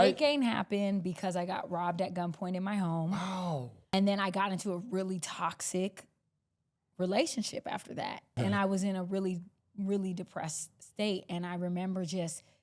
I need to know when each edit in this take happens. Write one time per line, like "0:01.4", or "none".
0:03.9
0:08.3